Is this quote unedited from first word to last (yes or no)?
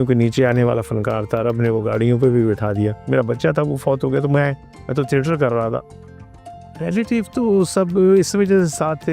no